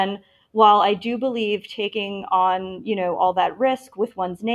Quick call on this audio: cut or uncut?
uncut